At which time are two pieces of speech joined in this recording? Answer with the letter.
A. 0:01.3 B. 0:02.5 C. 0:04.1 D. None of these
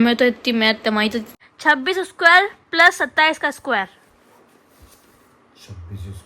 A